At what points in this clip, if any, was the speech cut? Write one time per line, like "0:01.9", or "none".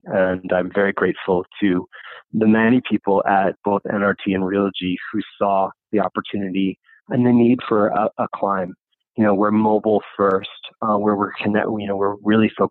none

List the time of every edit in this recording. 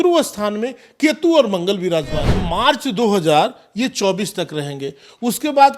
0:02.4

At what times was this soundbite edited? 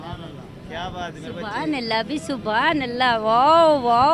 none

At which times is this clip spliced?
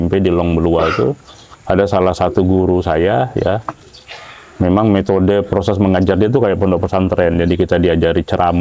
none

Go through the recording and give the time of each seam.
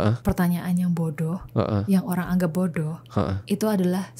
none

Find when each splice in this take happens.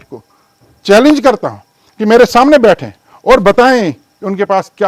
none

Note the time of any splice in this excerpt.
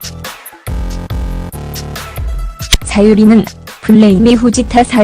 0:01.5

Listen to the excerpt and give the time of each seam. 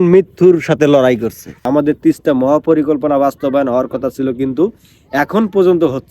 0:01.5

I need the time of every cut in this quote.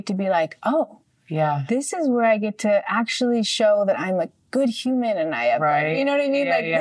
none

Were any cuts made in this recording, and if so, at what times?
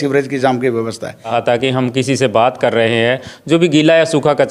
0:01.3

